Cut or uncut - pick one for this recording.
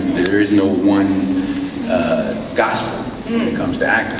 uncut